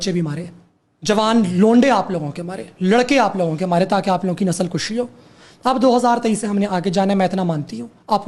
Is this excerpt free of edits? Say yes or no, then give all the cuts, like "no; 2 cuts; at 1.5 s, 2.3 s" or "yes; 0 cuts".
yes; 0 cuts